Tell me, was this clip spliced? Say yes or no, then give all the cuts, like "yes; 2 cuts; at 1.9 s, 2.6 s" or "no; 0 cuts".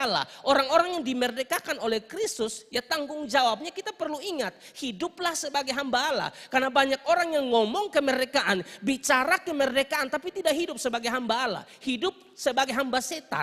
no; 0 cuts